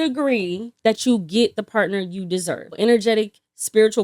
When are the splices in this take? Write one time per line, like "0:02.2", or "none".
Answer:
0:02.7